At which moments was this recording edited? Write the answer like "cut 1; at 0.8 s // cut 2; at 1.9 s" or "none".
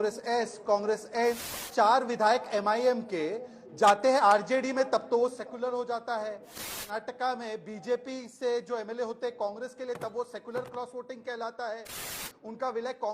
cut 1; at 1.6 s // cut 2; at 6.8 s // cut 3; at 12.2 s